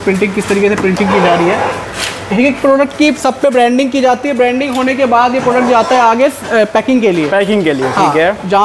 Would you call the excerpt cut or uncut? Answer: uncut